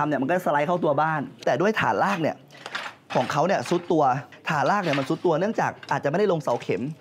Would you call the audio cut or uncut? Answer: cut